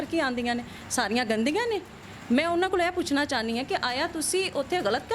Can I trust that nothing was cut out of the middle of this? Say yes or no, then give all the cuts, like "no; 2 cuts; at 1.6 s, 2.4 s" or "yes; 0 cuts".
yes; 0 cuts